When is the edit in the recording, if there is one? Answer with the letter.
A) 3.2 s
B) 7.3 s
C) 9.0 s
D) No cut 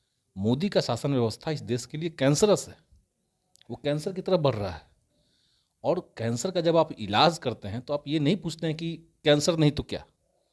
D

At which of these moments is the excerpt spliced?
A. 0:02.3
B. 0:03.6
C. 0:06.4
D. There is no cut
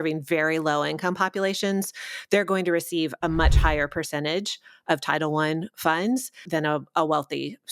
C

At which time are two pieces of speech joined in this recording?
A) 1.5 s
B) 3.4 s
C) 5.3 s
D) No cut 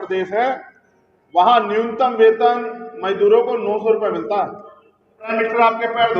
C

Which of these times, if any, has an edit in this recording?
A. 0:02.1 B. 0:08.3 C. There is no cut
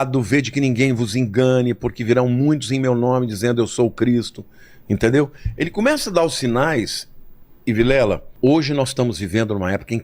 B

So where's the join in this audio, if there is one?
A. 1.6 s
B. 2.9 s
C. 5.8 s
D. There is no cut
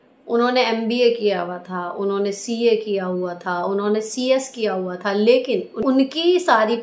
C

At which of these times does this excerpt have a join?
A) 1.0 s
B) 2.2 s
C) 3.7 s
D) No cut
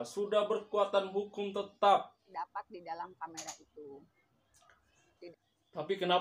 B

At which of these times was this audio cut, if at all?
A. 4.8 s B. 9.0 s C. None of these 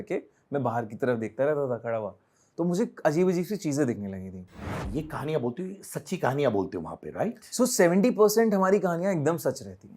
A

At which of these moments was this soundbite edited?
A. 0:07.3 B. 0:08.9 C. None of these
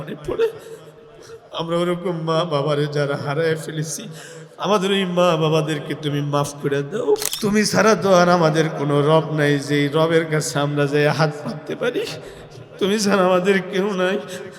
A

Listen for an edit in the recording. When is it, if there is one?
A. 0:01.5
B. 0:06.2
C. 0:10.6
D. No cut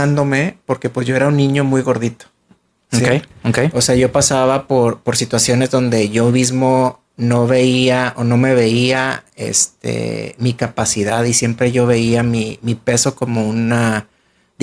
D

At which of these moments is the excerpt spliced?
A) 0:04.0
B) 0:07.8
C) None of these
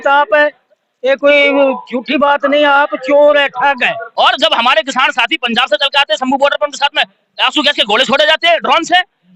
A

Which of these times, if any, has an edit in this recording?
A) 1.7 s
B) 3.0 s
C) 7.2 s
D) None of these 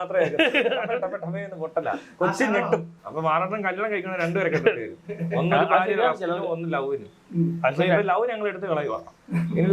B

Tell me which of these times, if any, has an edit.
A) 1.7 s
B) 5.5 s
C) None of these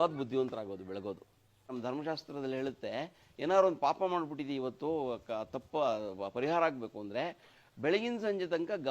A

